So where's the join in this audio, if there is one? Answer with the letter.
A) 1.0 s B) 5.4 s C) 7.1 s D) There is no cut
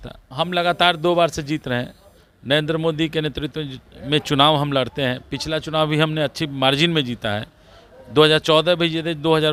D